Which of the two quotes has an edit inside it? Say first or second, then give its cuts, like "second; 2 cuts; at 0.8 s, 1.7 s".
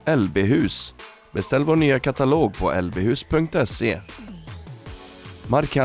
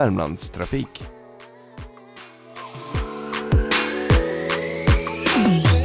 second; 1 cut; at 0.9 s